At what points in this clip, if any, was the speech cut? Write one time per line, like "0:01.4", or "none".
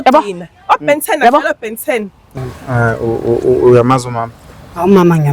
0:02.2